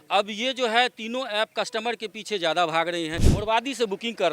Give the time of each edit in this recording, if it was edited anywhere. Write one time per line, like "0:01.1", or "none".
0:03.2